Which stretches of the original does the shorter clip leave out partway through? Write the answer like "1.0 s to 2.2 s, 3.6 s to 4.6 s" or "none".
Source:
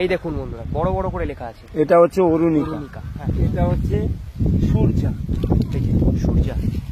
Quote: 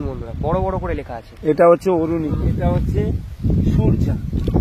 2.6 s to 3.3 s